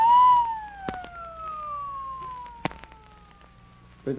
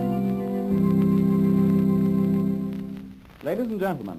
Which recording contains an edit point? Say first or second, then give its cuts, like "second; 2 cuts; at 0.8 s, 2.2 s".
second; 1 cut; at 2.0 s